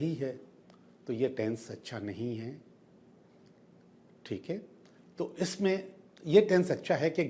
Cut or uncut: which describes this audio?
uncut